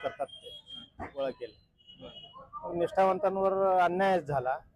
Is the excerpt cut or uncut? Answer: cut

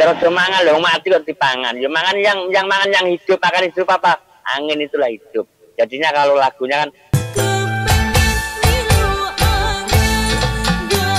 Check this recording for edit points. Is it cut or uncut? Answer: uncut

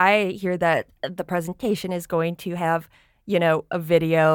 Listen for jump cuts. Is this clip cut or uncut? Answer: uncut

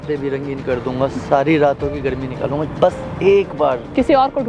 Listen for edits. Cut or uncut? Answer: uncut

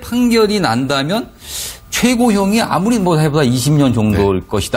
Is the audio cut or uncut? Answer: uncut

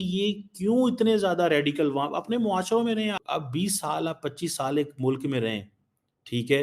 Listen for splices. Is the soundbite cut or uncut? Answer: cut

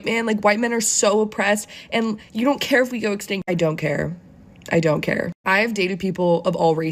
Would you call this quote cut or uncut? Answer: uncut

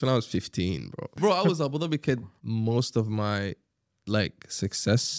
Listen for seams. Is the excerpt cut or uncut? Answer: cut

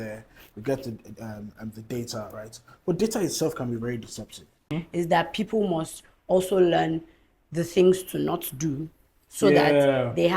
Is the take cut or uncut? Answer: cut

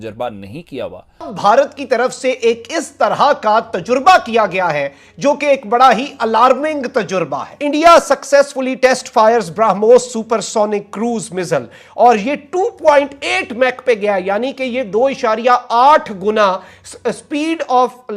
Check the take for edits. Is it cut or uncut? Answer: cut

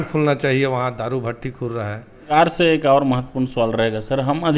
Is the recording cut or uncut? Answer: cut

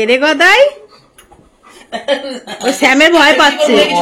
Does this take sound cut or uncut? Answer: uncut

